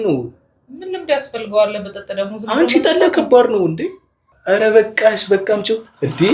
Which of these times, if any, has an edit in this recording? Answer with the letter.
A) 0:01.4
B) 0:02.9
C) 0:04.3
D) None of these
C